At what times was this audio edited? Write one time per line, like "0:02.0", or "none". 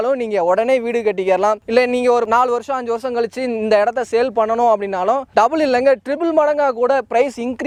none